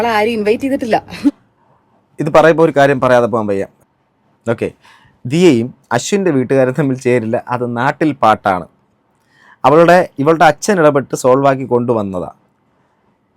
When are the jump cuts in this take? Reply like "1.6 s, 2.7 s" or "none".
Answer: 3.8 s